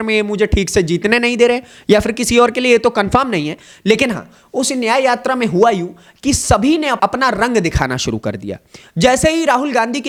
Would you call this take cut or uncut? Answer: uncut